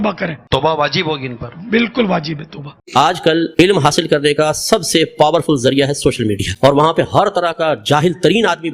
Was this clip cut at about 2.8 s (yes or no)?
yes